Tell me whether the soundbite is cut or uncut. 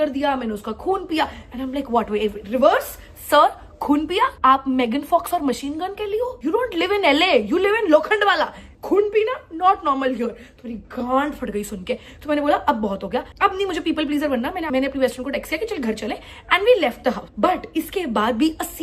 uncut